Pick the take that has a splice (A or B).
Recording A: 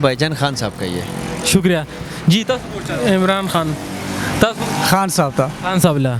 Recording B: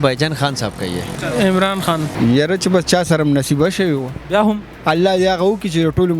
B